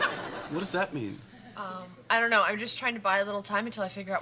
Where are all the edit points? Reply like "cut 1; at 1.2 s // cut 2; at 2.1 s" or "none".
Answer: none

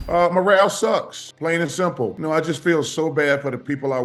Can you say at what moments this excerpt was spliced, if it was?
none

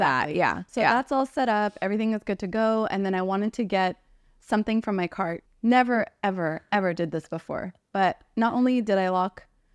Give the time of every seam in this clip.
cut 1; at 5.4 s

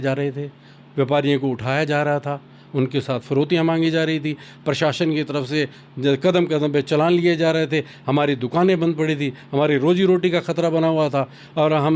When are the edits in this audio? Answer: none

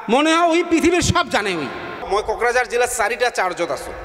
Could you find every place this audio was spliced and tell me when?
cut 1; at 2.0 s

